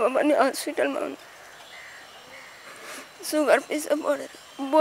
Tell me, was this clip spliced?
no; 0 cuts

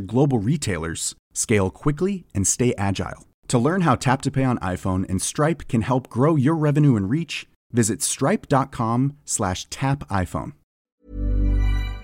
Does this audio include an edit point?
yes; 1 cut; at 10.7 s

